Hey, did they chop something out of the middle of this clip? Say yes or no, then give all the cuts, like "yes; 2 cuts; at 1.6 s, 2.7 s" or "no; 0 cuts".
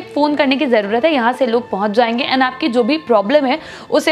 no; 0 cuts